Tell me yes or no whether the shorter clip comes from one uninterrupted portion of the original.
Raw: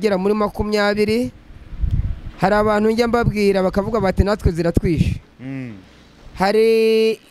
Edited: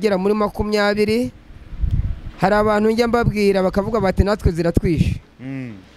yes